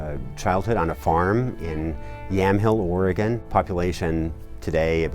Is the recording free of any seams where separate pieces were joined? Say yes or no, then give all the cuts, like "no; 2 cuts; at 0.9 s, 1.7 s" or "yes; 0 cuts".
no; 1 cut; at 3.4 s